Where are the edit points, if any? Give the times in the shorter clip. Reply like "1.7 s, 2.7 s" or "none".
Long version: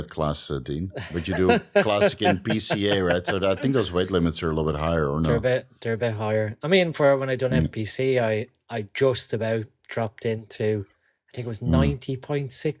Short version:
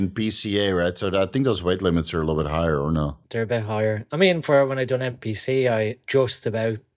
3.1 s, 6.0 s